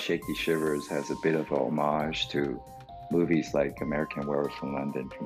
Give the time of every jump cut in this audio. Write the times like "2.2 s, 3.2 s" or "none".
none